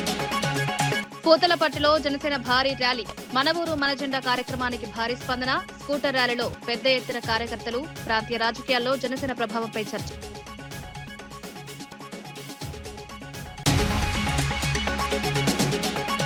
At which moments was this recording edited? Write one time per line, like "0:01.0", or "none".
none